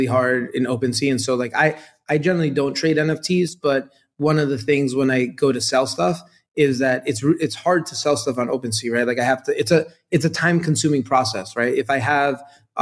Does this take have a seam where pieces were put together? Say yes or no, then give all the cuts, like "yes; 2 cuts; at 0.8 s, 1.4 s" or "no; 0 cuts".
no; 0 cuts